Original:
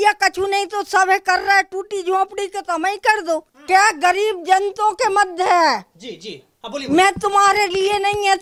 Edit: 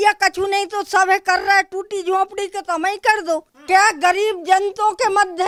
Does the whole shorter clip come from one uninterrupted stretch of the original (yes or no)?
yes